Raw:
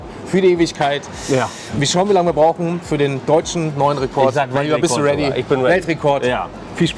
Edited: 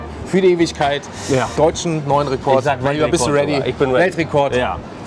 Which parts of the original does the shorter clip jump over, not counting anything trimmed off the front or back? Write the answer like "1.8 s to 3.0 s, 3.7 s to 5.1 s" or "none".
1.5 s to 3.2 s